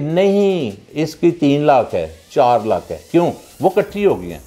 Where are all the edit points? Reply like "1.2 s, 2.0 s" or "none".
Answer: none